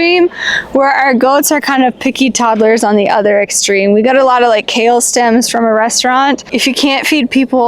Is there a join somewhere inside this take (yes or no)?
yes